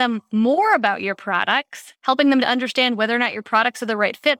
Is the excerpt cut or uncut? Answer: uncut